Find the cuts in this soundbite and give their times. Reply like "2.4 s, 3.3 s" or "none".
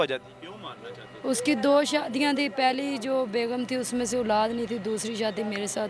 none